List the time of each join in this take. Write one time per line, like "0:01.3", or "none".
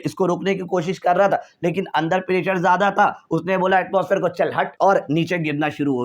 0:04.7